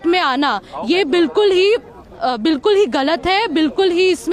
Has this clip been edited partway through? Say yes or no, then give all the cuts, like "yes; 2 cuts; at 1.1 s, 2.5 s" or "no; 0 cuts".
no; 0 cuts